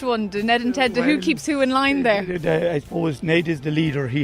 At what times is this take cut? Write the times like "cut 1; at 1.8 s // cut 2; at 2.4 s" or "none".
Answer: none

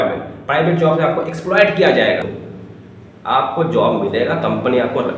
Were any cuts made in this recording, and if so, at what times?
cut 1; at 2.4 s

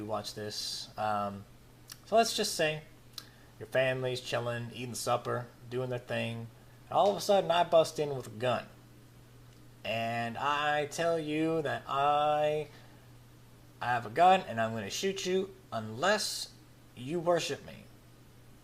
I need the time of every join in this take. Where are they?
none

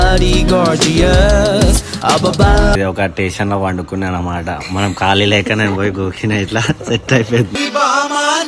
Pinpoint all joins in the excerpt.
cut 1; at 2.8 s

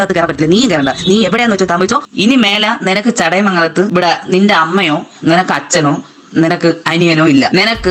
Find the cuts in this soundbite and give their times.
none

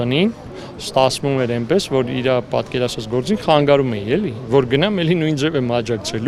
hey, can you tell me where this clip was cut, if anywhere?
none

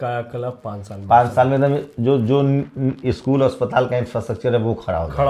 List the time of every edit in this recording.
none

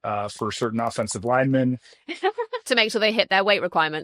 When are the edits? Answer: cut 1; at 2.5 s

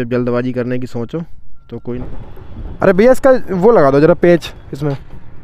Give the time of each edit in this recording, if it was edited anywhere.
cut 1; at 1.8 s

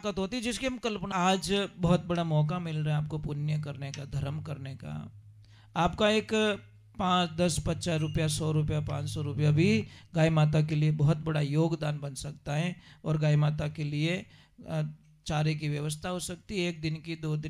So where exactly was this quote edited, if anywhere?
cut 1; at 1.1 s

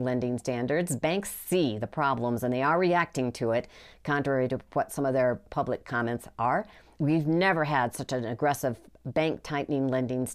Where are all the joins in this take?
cut 1; at 6.9 s

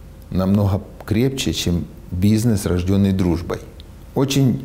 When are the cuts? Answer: none

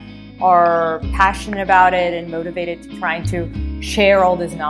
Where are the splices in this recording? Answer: none

